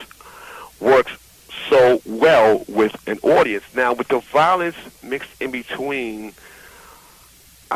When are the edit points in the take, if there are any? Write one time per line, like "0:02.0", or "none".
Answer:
0:03.6